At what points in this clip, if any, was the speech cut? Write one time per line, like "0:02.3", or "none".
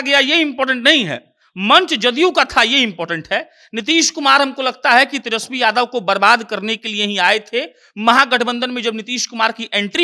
none